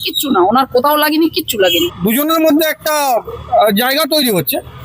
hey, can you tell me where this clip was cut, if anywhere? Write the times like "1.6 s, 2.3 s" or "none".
1.9 s